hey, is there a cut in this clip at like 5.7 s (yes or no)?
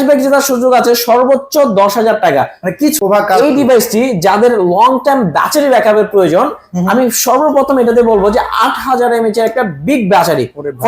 no